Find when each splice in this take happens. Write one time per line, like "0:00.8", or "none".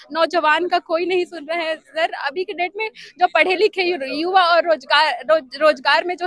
none